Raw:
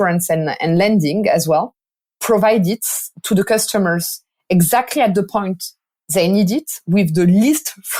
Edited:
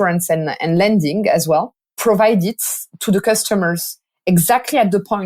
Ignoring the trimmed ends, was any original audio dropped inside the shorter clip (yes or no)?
yes